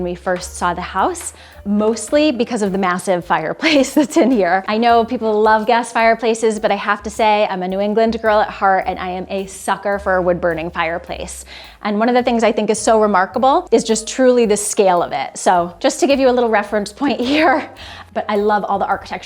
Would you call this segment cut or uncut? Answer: cut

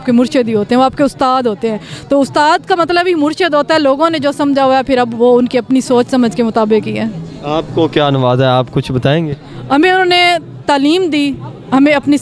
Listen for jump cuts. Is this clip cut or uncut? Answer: uncut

